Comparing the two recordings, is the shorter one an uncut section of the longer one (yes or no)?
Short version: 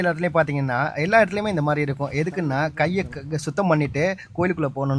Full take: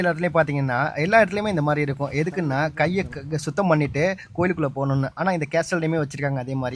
yes